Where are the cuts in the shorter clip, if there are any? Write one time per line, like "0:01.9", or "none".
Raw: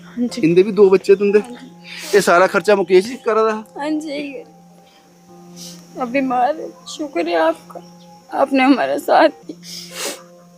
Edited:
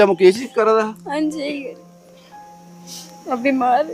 none